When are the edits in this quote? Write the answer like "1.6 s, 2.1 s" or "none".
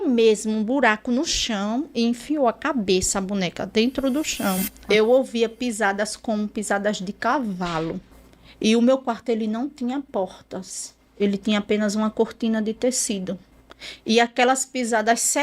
4.7 s